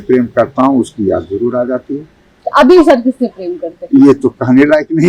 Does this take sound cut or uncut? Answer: uncut